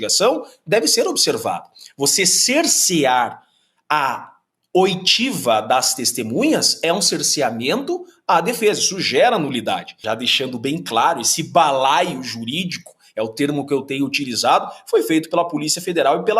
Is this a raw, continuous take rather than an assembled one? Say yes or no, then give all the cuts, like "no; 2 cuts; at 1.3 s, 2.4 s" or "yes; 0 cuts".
no; 1 cut; at 9.9 s